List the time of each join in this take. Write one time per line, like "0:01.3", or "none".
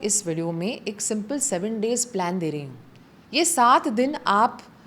none